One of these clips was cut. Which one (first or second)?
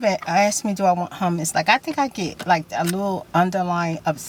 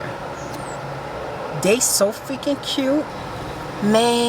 second